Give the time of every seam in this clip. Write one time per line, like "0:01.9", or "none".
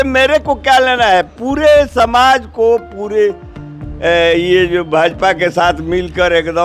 none